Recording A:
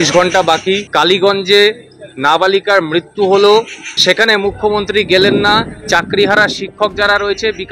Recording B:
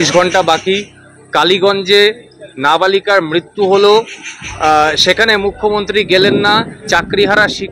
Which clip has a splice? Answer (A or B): A